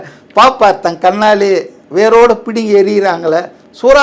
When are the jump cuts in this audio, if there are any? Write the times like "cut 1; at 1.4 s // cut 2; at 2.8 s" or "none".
none